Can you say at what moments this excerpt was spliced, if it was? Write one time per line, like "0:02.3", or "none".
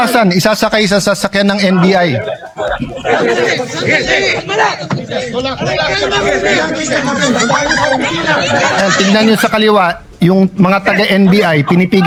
none